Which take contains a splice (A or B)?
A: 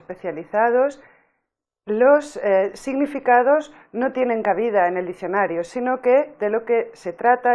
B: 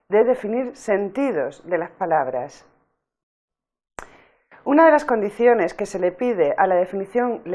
B